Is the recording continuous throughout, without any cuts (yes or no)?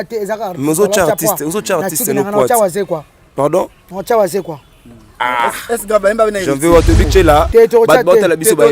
no